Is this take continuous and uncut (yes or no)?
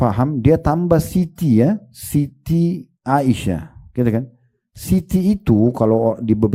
yes